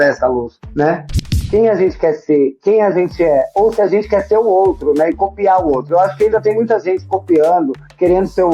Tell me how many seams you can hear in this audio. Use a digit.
1